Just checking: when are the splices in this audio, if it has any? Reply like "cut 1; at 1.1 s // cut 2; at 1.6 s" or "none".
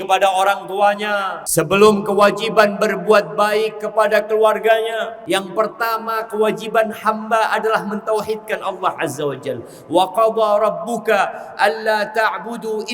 cut 1; at 1.4 s // cut 2; at 5.2 s

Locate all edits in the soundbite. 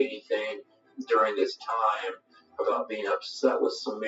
cut 1; at 1.1 s

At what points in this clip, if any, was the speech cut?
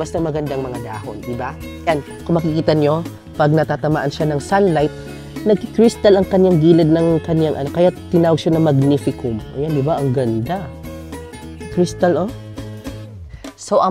none

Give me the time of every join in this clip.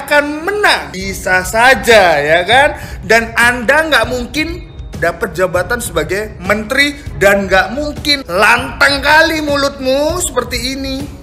none

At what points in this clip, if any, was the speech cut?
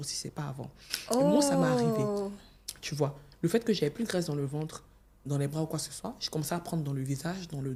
none

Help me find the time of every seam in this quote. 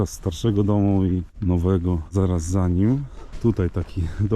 cut 1; at 1.3 s // cut 2; at 2.1 s // cut 3; at 3.2 s

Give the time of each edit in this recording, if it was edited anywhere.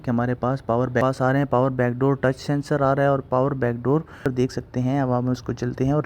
cut 1; at 1.0 s // cut 2; at 4.3 s

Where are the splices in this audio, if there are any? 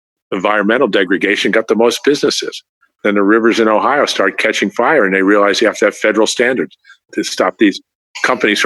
none

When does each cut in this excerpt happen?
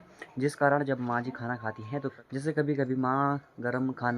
cut 1; at 2.1 s

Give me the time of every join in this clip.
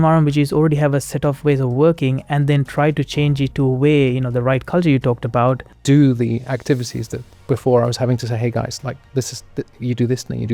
cut 1; at 3.5 s // cut 2; at 5.8 s

